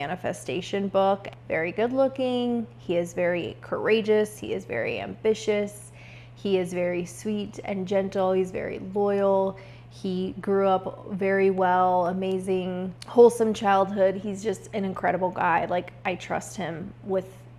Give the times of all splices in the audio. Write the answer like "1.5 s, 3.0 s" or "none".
1.3 s